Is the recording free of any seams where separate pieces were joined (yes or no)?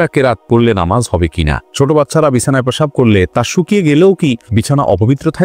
no